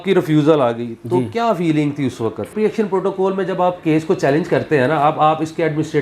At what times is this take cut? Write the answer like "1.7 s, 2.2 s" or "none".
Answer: 2.5 s